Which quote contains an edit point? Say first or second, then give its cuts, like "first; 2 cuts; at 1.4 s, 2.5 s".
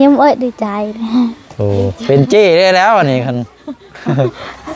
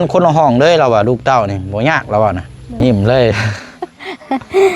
second; 1 cut; at 2.8 s